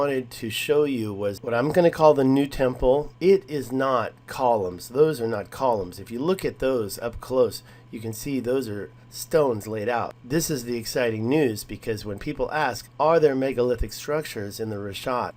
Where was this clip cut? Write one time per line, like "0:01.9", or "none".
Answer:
0:01.4